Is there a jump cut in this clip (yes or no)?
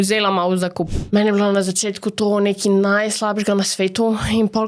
yes